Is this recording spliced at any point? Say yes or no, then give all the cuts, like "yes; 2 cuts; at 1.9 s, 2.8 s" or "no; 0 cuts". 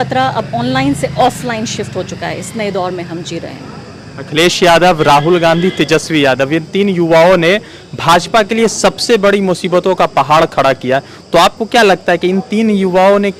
no; 0 cuts